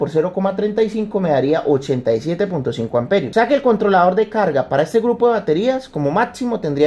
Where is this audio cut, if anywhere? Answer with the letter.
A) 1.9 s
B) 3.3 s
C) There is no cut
B